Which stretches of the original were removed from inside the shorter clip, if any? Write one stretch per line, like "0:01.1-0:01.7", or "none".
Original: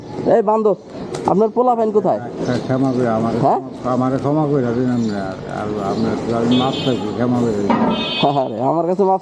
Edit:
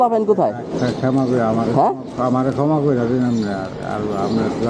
none